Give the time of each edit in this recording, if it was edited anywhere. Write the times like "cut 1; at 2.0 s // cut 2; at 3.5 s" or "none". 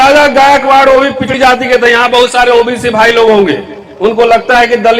cut 1; at 1.3 s